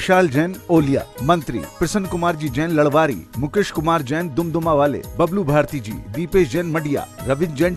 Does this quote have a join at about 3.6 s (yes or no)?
no